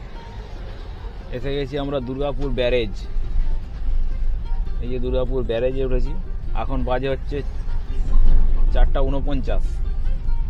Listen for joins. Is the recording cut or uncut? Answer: uncut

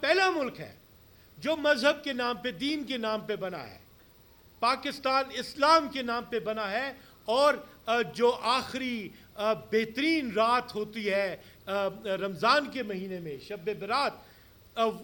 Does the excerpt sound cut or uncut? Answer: uncut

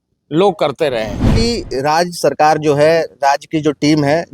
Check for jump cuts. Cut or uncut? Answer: cut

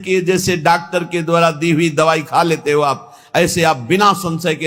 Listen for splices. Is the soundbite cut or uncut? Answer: uncut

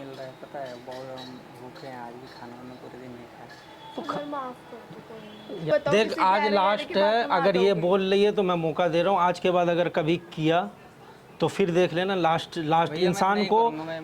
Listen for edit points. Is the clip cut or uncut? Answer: cut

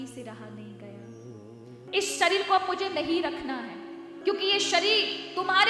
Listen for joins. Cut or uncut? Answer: cut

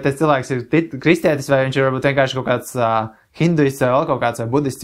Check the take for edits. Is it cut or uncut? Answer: uncut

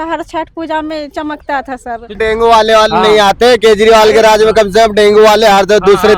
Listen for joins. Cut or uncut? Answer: cut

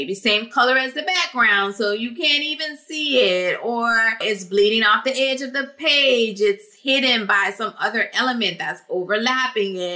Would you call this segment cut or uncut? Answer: cut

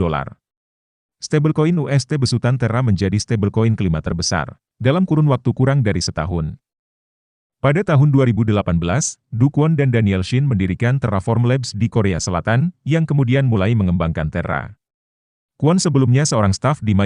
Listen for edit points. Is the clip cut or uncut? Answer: uncut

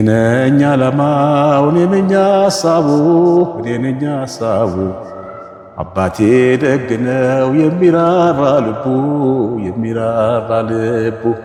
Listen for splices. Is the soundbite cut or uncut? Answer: uncut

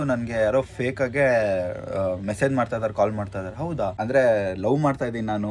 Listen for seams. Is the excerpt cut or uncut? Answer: cut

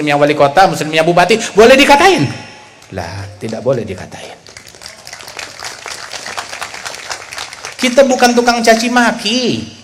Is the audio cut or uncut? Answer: uncut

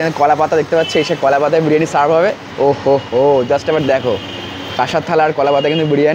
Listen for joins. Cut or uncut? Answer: uncut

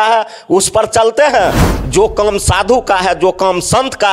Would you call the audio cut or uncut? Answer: cut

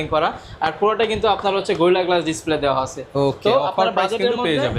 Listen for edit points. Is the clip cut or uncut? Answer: uncut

